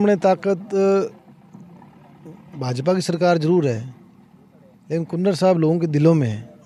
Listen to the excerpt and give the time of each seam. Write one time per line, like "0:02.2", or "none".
none